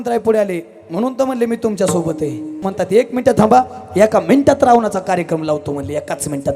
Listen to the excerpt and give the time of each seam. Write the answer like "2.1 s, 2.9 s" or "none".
2.7 s